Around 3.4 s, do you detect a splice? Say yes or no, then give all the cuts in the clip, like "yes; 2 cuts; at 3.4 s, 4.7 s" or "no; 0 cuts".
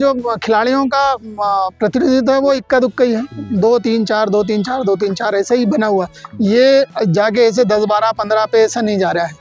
no; 0 cuts